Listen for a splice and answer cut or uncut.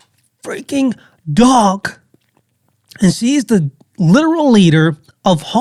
uncut